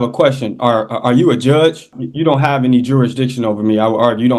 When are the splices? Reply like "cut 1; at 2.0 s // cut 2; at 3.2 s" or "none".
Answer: cut 1; at 2.0 s